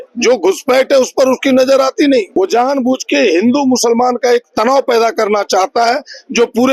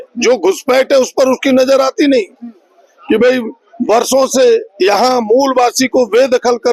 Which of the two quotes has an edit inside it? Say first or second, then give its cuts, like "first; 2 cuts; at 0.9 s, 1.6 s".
first; 1 cut; at 2.3 s